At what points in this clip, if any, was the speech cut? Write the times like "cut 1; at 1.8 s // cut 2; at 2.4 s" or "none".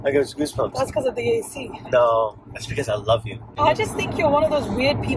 cut 1; at 3.5 s